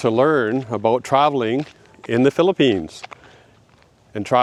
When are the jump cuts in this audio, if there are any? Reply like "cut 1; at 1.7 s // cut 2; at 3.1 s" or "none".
none